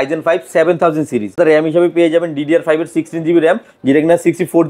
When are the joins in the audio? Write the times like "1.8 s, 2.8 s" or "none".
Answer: 1.4 s